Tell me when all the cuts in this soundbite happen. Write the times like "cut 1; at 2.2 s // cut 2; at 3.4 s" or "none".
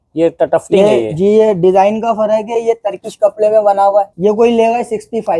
cut 1; at 4.1 s